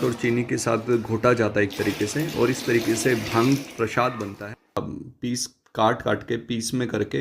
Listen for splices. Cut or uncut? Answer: cut